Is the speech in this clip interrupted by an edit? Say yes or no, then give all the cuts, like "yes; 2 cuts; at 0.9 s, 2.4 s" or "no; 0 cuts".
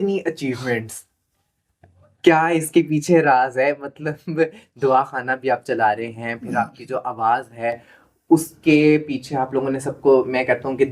no; 0 cuts